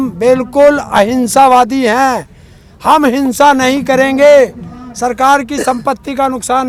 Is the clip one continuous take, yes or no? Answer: yes